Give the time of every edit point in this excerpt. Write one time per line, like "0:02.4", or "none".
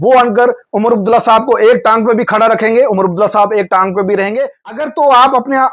0:04.8